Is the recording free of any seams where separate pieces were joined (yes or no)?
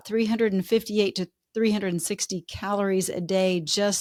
yes